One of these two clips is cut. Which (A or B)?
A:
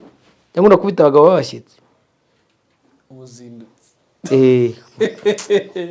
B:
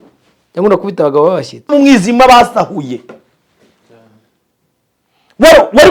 B